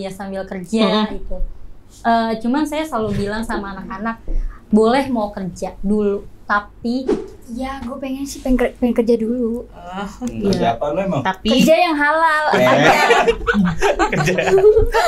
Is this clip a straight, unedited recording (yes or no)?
no